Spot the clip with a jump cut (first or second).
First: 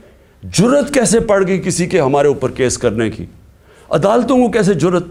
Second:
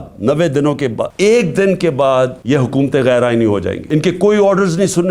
second